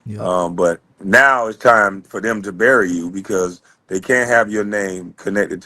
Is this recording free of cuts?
no; 1 cut; at 0.9 s

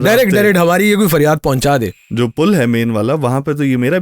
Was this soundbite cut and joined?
yes; 1 cut; at 2.0 s

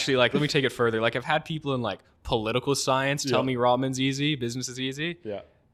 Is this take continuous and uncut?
yes; 0 cuts

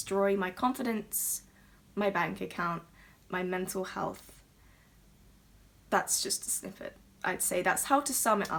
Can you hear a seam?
no; 0 cuts

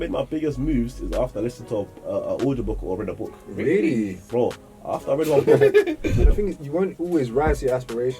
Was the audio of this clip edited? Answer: yes; 1 cut; at 6.2 s

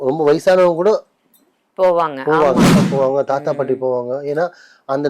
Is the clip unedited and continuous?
no; 1 cut; at 2.8 s

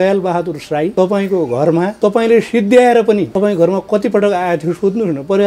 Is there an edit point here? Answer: yes; 3 cuts; at 0.9 s, 1.9 s, 3.3 s

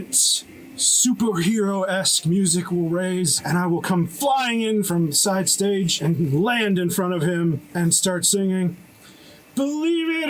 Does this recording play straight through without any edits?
no; 4 cuts; at 3.4 s, 4.9 s, 6.0 s, 7.7 s

